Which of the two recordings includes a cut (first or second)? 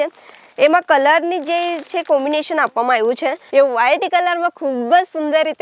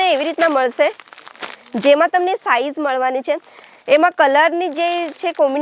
first